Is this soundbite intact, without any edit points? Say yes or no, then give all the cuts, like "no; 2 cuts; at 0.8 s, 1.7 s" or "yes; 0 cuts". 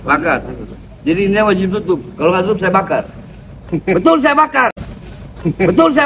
yes; 0 cuts